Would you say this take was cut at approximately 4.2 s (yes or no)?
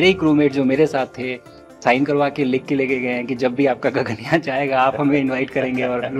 no